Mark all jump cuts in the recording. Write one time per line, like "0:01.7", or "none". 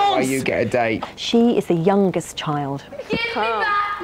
0:01.0

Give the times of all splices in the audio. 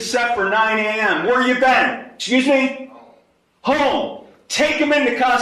0:02.1

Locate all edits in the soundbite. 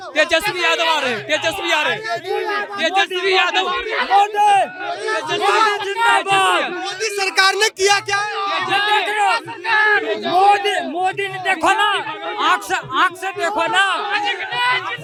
none

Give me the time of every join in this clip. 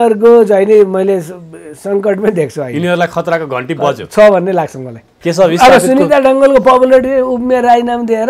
0:05.2

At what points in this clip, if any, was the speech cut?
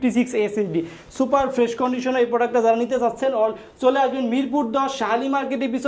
none

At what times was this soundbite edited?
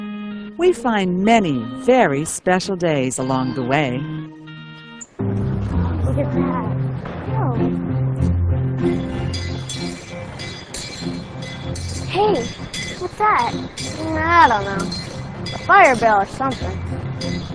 none

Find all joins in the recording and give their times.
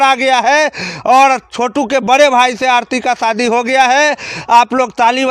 none

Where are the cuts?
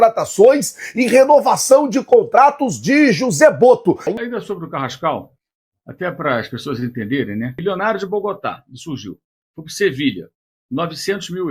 0:04.2
0:07.6

